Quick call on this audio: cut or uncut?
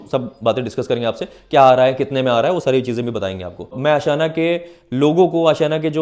cut